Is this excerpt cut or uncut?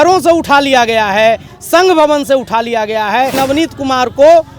cut